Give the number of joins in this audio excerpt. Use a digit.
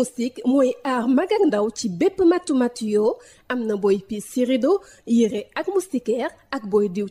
0